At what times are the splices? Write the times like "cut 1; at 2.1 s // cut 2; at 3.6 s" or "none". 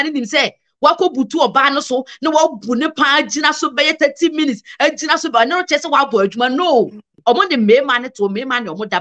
cut 1; at 7.1 s